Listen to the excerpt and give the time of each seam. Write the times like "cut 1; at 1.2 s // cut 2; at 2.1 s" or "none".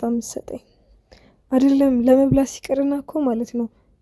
none